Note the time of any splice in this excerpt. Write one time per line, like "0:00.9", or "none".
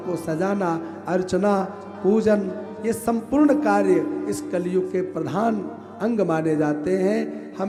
none